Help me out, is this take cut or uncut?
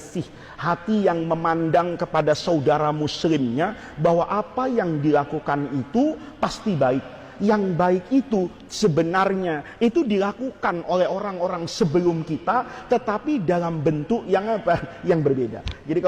uncut